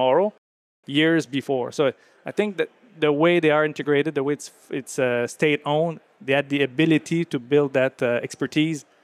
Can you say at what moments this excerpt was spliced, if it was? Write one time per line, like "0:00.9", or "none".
none